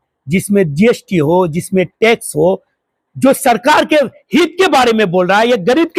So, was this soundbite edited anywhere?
no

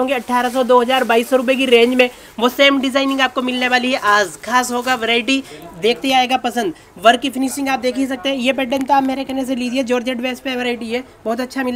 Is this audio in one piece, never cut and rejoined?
yes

